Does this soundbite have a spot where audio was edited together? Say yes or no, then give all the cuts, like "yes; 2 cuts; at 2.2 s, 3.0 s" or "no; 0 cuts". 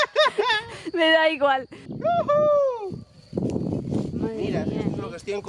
yes; 1 cut; at 1.8 s